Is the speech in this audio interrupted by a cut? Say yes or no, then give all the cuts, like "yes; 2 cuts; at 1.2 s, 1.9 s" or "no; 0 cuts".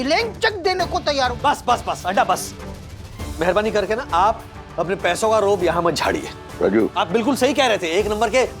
yes; 2 cuts; at 1.3 s, 6.8 s